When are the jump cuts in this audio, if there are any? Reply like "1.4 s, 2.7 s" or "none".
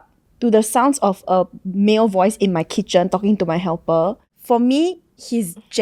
4.3 s